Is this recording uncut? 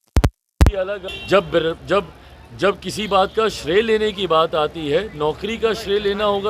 no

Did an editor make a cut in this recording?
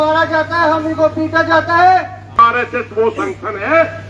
yes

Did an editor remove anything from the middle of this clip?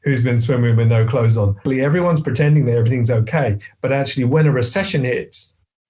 yes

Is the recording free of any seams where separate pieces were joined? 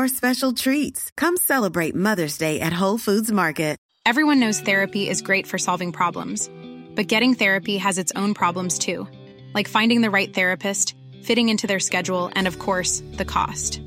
no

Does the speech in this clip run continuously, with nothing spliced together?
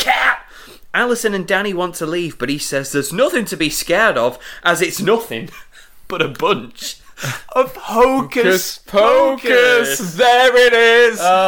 yes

